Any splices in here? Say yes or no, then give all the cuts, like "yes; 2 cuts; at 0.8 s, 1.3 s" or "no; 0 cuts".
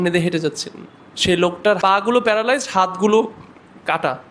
yes; 1 cut; at 1.8 s